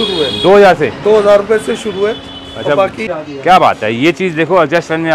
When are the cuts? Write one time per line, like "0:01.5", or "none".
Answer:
0:03.2